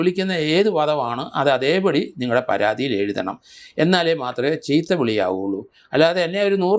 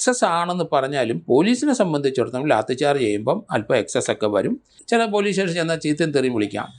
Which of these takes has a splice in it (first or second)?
second